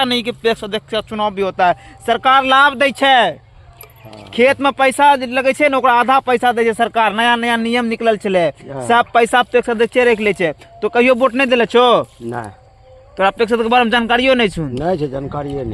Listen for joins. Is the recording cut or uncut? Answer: uncut